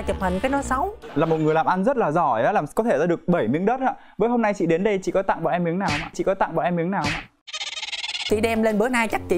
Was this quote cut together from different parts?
yes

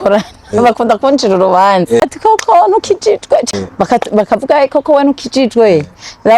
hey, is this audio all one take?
no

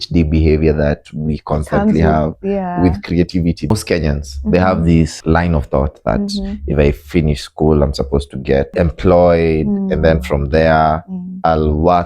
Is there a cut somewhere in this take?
yes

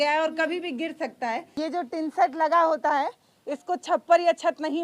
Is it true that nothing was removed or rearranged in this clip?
no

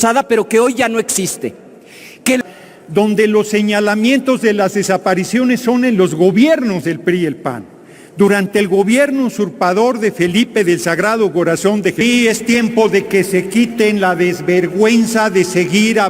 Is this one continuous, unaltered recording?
no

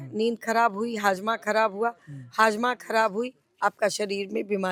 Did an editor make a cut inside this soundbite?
no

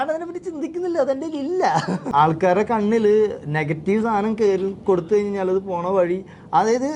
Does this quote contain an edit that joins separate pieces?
yes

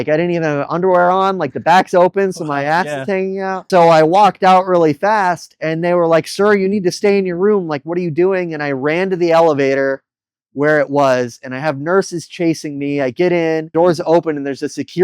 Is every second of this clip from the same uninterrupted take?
no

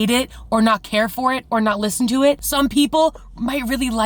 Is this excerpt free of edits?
no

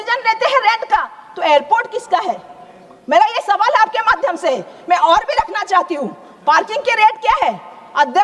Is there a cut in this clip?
no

